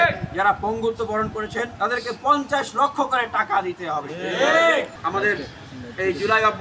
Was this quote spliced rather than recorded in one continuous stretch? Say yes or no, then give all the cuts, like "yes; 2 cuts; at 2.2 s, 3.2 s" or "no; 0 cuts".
yes; 2 cuts; at 1.7 s, 4.9 s